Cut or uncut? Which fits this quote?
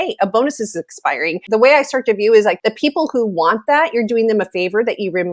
cut